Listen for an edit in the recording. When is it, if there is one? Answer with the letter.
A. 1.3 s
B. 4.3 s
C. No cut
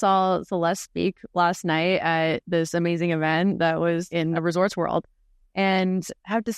B